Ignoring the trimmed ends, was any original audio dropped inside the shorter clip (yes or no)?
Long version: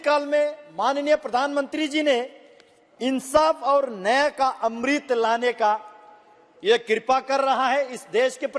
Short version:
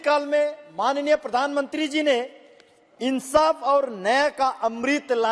no